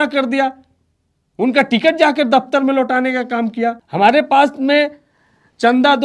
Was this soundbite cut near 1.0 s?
no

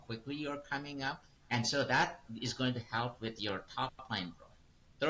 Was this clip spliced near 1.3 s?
yes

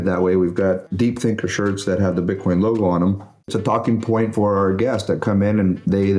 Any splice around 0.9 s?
yes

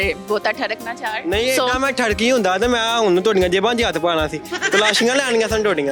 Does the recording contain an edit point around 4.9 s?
no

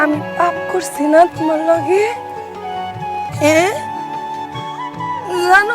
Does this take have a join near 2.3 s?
no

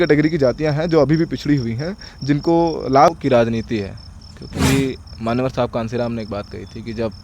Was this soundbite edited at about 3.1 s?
yes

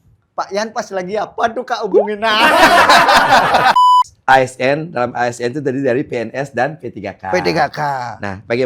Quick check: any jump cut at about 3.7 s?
yes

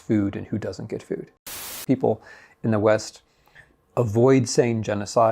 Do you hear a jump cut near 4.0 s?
no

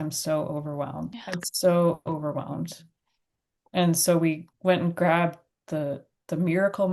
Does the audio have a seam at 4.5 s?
yes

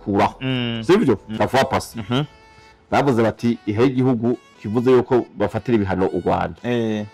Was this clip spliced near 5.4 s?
no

